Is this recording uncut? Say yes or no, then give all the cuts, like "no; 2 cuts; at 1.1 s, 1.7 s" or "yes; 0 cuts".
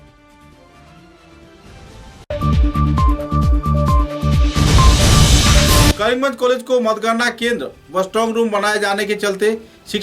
no; 1 cut; at 5.9 s